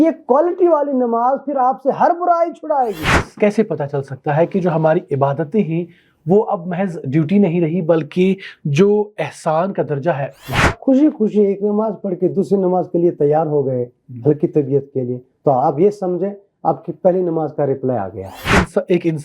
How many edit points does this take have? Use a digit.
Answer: 3